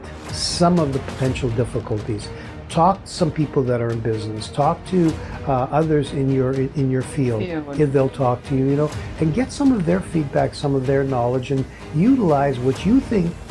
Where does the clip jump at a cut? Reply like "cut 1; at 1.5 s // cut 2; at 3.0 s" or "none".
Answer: none